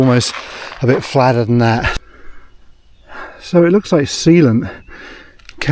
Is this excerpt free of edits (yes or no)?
no